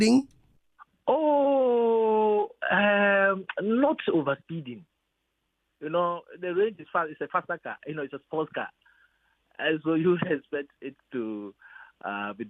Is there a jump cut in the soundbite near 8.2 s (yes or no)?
no